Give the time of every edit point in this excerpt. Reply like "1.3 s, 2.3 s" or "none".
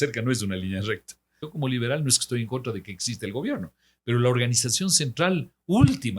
1.3 s